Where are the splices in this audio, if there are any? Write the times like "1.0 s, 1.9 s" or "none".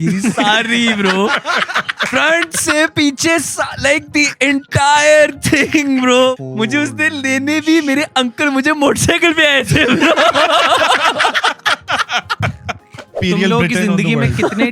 6.4 s, 13.2 s